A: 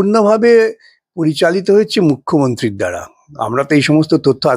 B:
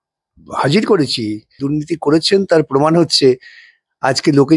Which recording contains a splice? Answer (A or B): B